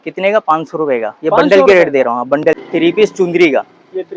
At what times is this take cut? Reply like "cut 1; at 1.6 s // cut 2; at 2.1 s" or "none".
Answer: cut 1; at 2.6 s